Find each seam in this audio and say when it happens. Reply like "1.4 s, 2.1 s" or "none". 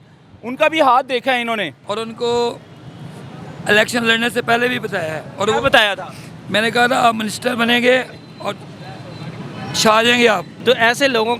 1.8 s, 10.5 s